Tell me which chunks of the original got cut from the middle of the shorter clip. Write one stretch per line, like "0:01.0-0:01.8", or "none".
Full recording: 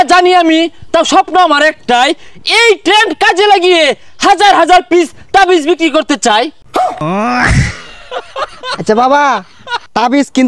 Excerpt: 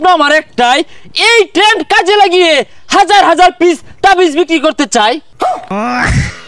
0:06.8-0:06.9

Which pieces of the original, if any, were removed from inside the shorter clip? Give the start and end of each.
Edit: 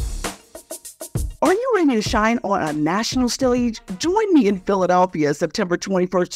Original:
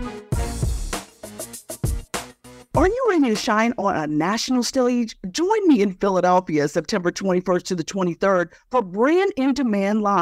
0:02.1-0:02.8

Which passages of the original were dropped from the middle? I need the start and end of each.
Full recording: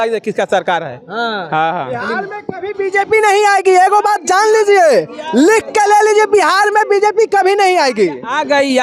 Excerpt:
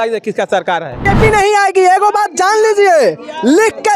0:01.0-0:02.9

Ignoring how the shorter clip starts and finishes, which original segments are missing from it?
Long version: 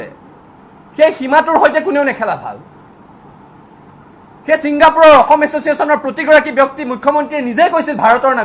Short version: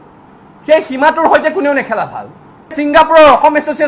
0:03.0-0:04.6

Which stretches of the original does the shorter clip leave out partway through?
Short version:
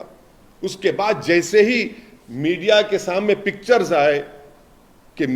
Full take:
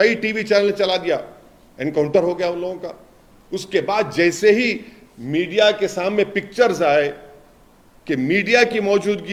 none

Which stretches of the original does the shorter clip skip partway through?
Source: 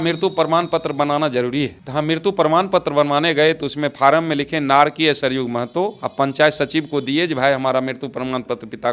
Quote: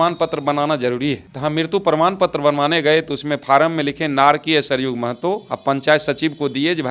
none

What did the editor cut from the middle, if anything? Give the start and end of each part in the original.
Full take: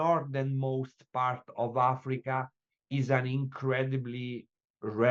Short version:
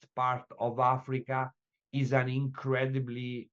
none

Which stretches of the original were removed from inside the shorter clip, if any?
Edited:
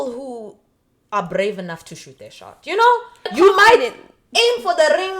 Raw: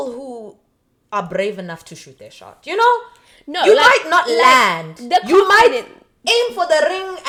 0:03.3-0:05.2

